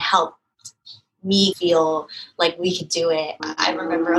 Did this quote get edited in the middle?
yes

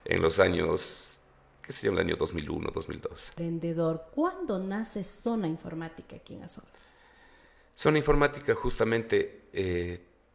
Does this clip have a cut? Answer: yes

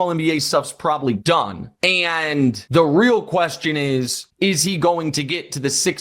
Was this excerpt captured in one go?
no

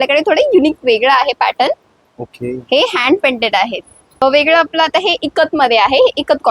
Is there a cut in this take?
yes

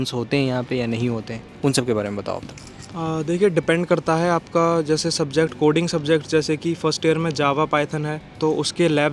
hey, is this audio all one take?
yes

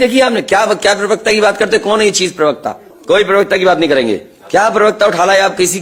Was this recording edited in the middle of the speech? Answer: no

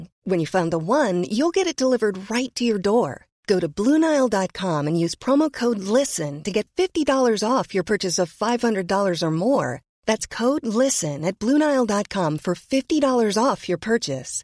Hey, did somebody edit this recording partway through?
no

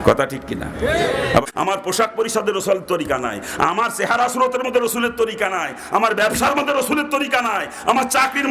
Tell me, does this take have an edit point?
yes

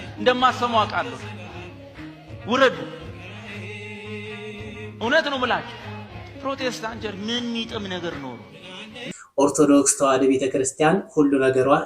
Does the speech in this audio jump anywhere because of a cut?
yes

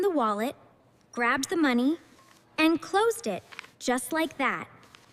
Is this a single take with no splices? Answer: yes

